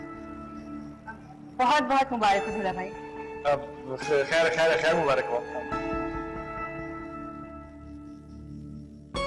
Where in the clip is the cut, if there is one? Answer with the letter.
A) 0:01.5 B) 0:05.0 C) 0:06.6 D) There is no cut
D